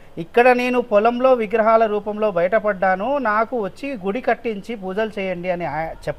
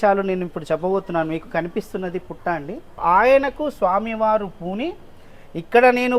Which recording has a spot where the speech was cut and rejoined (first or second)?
second